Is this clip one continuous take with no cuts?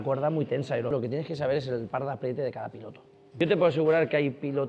no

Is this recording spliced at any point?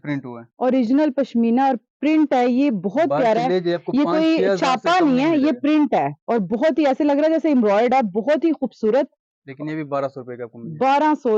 no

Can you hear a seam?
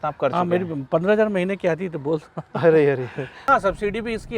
yes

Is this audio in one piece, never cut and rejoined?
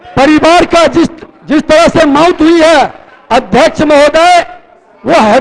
yes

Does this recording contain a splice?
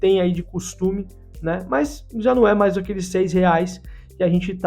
no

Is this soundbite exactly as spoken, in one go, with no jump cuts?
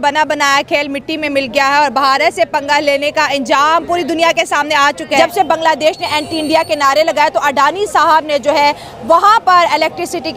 no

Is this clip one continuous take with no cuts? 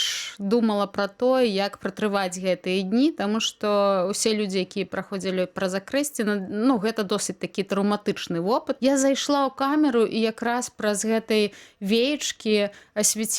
no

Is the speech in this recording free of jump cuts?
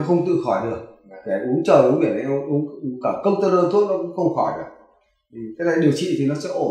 yes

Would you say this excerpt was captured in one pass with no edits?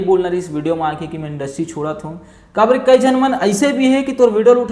yes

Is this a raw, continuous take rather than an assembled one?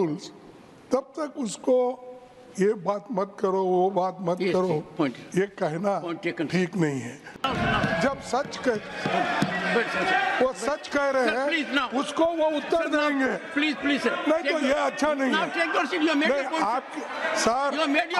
no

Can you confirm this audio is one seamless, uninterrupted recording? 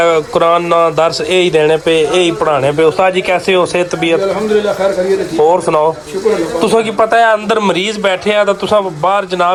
yes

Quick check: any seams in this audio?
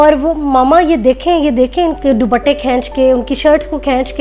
yes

